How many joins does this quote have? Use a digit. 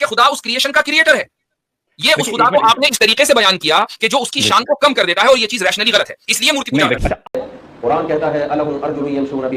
1